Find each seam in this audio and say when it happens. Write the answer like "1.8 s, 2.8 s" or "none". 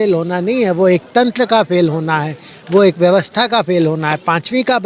none